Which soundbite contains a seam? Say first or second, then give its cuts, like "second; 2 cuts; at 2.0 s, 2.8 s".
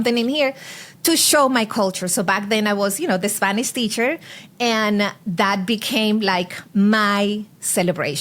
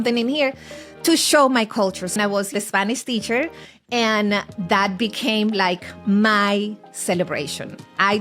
second; 1 cut; at 2.2 s